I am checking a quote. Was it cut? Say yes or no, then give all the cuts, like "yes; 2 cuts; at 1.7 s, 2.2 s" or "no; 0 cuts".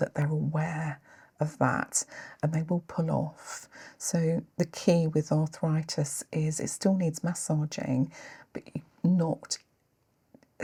no; 0 cuts